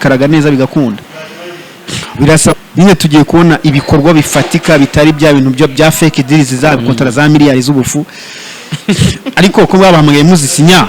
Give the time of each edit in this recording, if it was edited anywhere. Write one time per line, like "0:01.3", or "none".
0:02.5

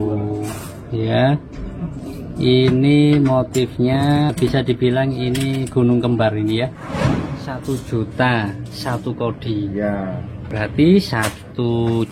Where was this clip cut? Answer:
0:02.0
0:04.3
0:07.3
0:10.5

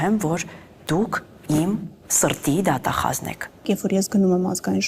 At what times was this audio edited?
0:02.0
0:03.6

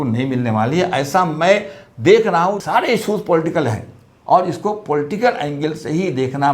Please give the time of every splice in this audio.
0:02.6

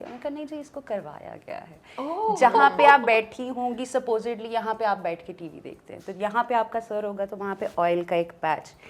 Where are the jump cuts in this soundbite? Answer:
none

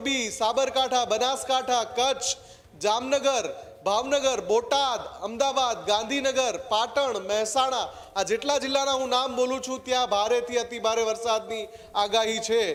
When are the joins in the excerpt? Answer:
none

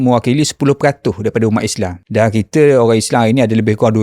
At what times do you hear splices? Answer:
0:02.0

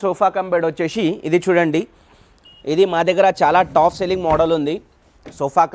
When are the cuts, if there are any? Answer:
none

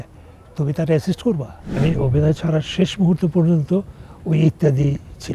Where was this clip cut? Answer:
0:01.7

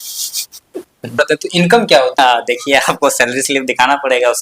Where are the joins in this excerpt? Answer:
0:01.2
0:02.1

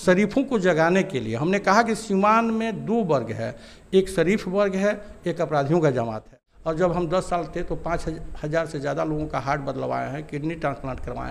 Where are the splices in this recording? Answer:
0:06.3

